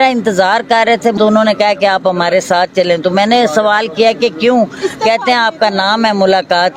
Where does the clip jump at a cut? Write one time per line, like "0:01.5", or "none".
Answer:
0:01.2